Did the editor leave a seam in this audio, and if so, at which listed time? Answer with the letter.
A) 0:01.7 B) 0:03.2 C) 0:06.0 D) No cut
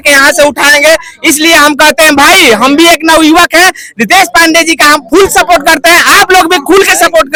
D